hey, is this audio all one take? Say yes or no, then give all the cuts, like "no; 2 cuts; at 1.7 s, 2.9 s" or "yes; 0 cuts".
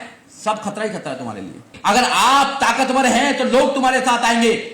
no; 1 cut; at 1.7 s